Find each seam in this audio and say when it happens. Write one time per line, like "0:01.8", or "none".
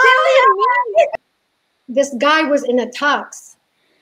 0:01.1